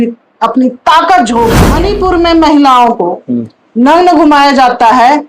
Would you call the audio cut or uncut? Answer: cut